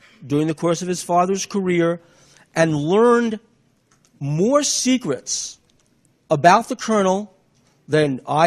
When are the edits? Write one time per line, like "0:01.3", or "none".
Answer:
0:04.2